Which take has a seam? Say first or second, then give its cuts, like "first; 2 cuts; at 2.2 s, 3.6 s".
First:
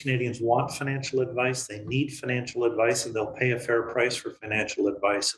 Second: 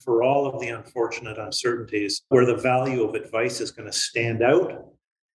second; 1 cut; at 2.3 s